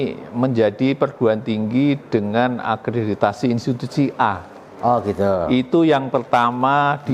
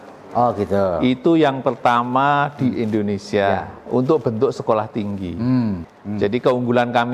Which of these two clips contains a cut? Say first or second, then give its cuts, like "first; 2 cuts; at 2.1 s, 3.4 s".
second; 1 cut; at 5.8 s